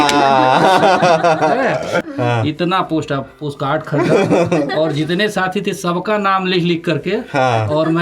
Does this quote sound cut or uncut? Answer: cut